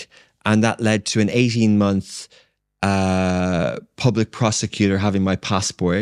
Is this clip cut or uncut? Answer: uncut